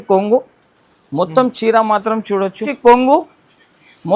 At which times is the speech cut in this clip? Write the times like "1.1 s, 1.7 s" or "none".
2.7 s